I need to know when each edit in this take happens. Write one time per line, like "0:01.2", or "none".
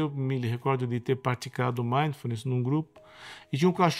none